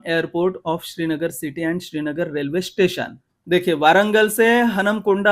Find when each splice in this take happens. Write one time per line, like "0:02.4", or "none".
0:03.3

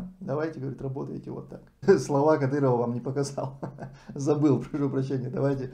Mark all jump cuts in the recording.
0:01.7

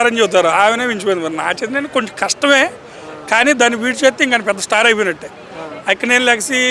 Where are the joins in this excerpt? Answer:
none

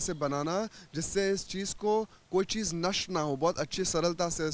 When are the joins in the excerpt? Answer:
none

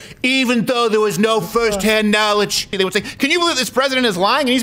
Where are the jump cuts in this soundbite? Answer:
0:02.7

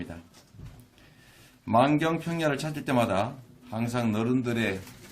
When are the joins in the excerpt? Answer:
0:02.6

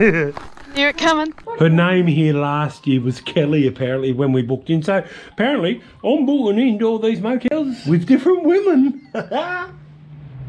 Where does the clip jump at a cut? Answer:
0:01.4
0:07.8

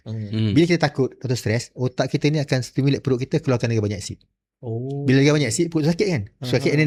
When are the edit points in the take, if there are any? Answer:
none

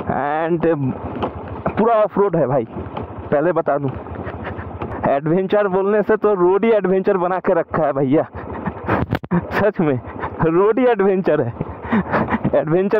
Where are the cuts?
0:04.8

